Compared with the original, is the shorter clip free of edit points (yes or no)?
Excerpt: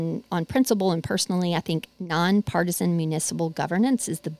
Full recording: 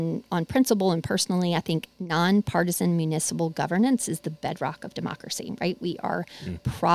yes